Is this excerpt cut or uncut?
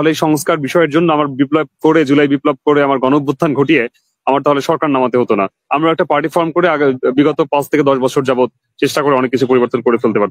uncut